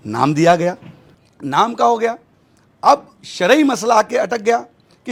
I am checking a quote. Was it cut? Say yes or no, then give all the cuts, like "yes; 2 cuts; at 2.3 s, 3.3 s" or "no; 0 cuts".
no; 0 cuts